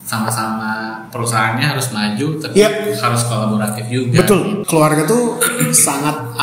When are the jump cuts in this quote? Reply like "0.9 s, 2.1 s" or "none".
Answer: 4.6 s